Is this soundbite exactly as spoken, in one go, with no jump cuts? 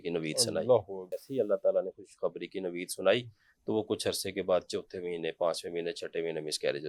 no; 1 cut; at 1.2 s

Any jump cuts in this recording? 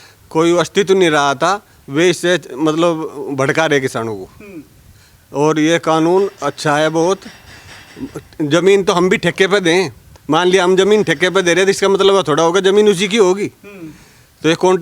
no; 0 cuts

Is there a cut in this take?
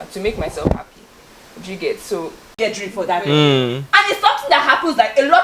yes; 1 cut; at 2.4 s

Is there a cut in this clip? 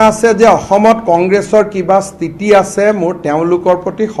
no; 0 cuts

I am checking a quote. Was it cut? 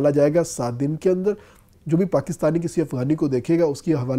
yes; 1 cut; at 1.7 s

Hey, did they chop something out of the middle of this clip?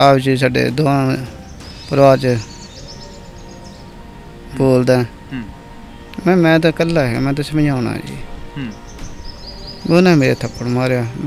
no; 0 cuts

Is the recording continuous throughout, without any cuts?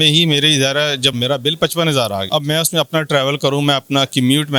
no; 2 cuts; at 1.2 s, 2.3 s

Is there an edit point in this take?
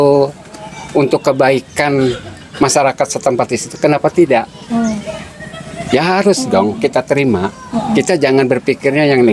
no; 0 cuts

